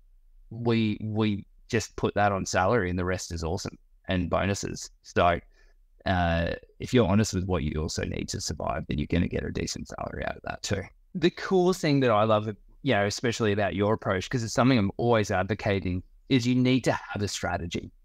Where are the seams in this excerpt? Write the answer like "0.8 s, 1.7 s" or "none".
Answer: 11.1 s